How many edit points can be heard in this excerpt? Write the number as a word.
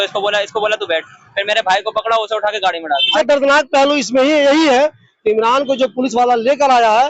one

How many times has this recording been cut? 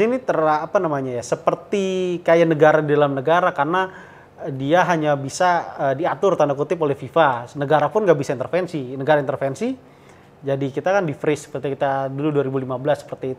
zero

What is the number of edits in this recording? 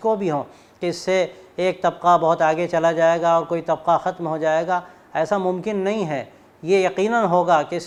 zero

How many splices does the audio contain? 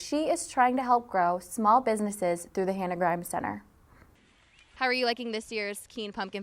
one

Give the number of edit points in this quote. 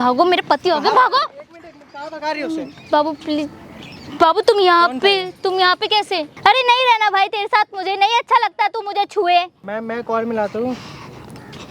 two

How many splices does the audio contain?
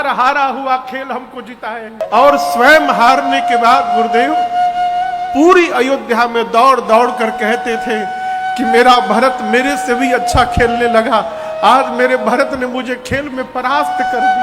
one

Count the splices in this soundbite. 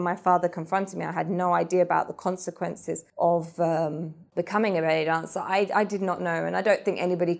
two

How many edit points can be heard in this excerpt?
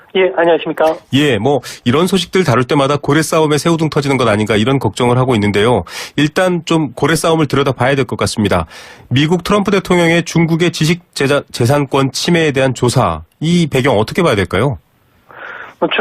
one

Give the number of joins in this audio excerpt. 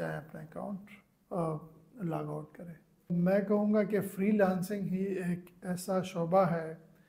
one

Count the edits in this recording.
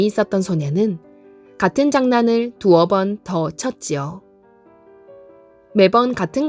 two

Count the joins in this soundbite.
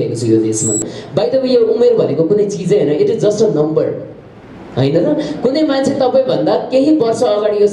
one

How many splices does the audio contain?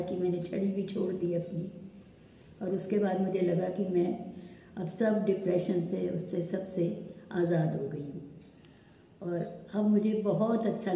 zero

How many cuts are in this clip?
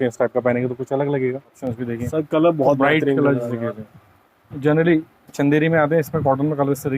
one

